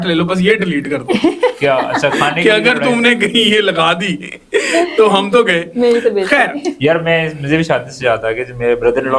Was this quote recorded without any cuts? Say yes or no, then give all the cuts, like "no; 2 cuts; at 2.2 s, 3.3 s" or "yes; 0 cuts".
yes; 0 cuts